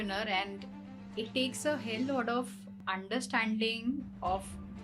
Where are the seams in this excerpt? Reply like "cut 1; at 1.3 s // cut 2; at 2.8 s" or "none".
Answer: cut 1; at 2.8 s